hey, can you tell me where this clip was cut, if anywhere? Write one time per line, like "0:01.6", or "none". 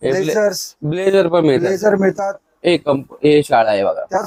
none